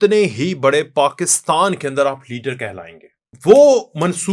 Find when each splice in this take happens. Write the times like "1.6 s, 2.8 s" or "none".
3.3 s